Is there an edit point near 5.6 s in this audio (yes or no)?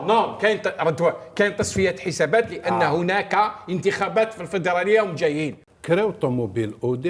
yes